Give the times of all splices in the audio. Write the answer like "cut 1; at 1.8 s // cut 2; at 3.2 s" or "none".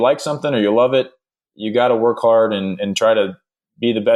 none